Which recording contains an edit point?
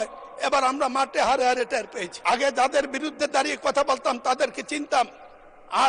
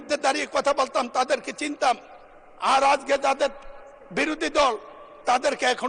first; 1 cut; at 2.0 s

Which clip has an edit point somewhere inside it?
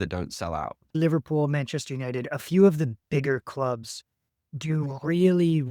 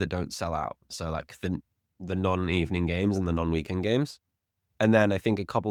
first; 1 cut; at 1.0 s

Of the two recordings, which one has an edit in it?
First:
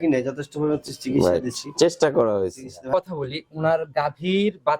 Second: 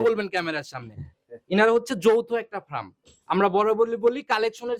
first; 1 cut; at 2.8 s

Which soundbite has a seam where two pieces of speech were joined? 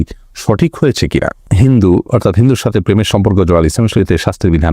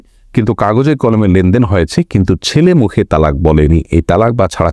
first; 2 cuts; at 1.5 s, 4.0 s

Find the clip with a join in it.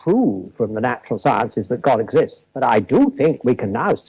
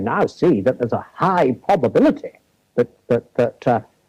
first; 1 cut; at 2.4 s

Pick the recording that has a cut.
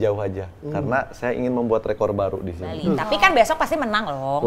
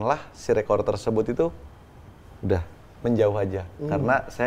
first; 1 cut; at 2.9 s

